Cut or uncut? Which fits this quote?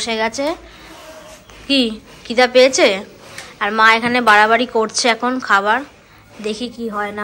uncut